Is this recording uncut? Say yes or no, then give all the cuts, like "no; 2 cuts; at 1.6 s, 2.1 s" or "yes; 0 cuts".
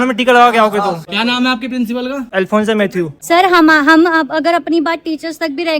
no; 2 cuts; at 1.1 s, 3.2 s